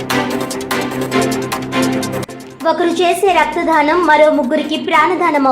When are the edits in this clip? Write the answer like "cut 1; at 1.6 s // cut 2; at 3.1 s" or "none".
cut 1; at 2.2 s